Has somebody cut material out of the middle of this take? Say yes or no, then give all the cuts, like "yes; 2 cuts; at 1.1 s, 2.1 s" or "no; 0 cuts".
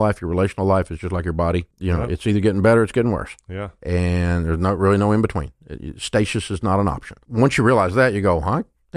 yes; 2 cuts; at 1.7 s, 7.2 s